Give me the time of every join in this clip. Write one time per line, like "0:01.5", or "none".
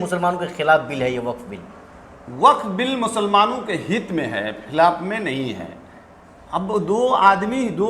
none